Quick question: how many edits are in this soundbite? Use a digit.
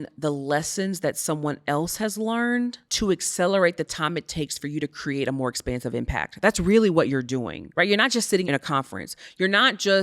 3